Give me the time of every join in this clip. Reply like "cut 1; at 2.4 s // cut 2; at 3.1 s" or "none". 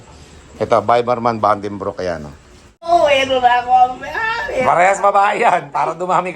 cut 1; at 2.8 s